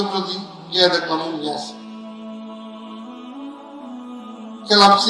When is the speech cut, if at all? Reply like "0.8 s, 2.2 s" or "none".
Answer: 2.2 s, 4.0 s

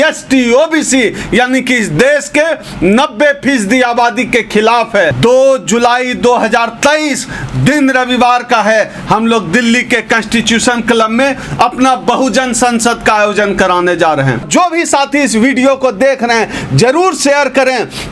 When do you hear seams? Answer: 5.1 s, 14.5 s

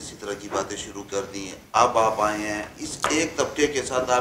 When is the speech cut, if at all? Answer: none

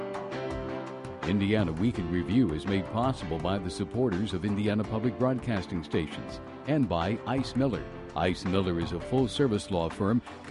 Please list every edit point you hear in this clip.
1.2 s

